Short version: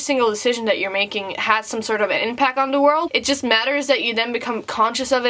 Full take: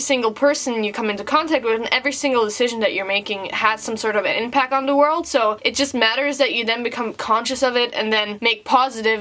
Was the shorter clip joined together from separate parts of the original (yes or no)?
yes